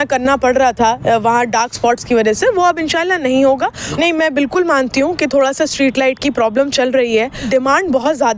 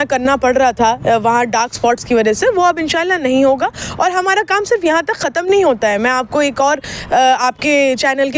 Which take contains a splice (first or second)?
first